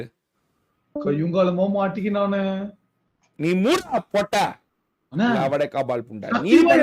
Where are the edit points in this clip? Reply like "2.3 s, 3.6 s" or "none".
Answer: none